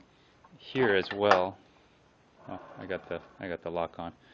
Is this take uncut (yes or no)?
no